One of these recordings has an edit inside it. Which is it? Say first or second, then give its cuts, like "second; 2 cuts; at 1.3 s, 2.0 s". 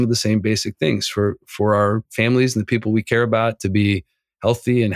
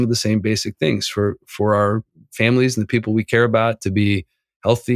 first; 1 cut; at 2.1 s